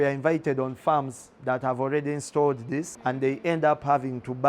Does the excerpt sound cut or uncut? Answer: cut